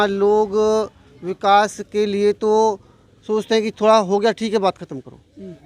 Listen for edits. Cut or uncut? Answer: uncut